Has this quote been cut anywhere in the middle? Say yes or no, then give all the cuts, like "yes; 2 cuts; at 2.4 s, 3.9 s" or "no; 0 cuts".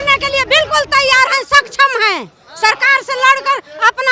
no; 0 cuts